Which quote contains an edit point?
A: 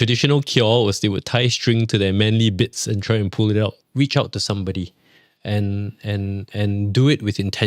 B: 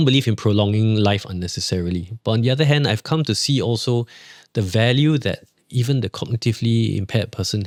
A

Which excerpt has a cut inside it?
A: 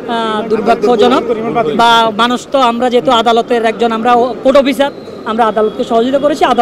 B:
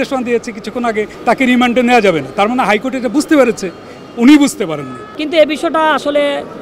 B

